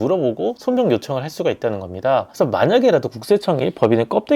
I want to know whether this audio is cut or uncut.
cut